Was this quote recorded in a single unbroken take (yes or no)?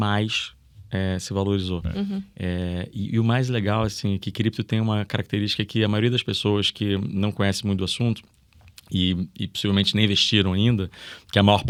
yes